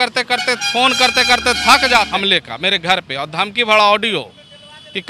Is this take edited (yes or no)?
yes